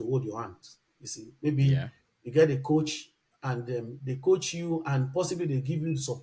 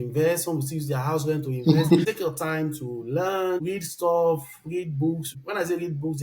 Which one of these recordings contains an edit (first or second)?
second